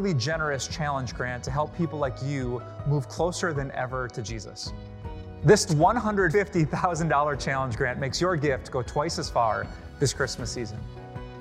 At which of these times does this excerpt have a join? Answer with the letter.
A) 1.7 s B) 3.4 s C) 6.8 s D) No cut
A